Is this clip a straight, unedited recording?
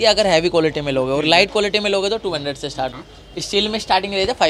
no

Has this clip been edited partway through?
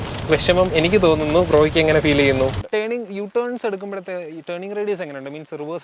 yes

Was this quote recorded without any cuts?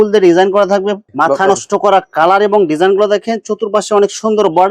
no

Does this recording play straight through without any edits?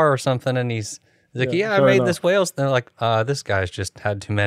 yes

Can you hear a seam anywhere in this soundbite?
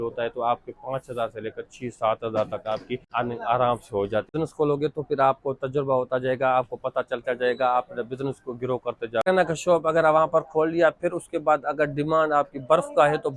yes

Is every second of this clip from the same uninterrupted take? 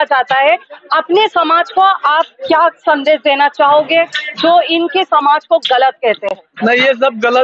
yes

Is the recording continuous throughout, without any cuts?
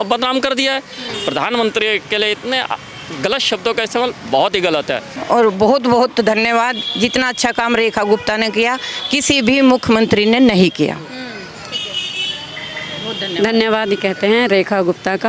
no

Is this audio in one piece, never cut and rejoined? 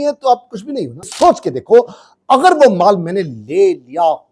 no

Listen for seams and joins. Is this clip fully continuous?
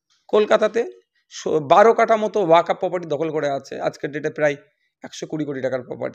yes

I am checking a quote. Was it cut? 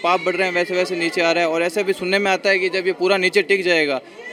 no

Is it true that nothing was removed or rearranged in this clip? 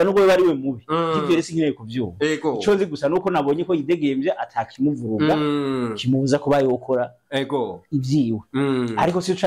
yes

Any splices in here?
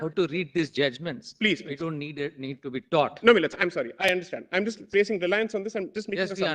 no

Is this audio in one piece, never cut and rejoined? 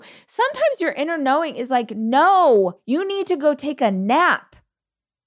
no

